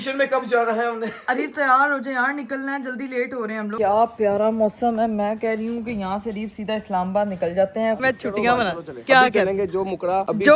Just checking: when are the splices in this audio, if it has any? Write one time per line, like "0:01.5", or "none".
0:03.7
0:08.0